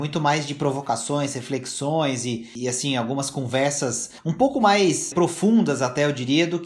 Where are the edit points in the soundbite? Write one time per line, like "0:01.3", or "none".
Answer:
0:02.5
0:04.1
0:05.1